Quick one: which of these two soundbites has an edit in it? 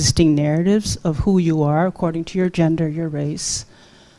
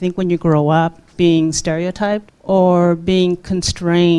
second; 2 cuts; at 1.1 s, 2.3 s

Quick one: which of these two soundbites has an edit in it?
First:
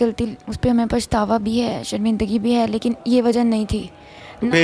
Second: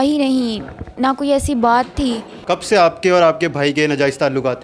second; 1 cut; at 2.3 s

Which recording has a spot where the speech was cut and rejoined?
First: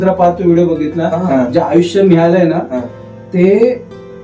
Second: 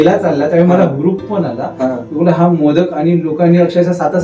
first; 1 cut; at 1.3 s

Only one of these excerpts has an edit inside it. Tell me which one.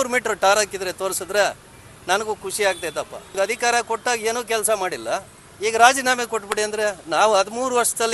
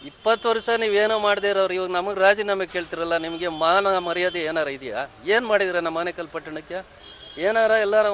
first; 1 cut; at 3.3 s

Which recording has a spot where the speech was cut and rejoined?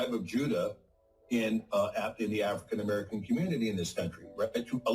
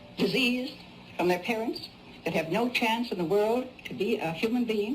first; 1 cut; at 1.2 s

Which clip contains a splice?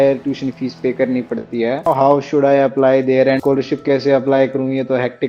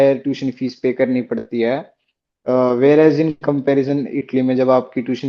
first; 2 cuts; at 1.9 s, 3.4 s

